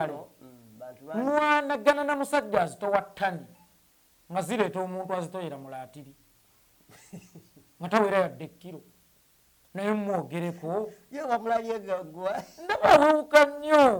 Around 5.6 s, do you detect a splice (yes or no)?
no